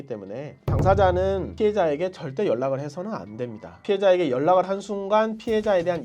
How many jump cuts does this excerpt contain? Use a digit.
1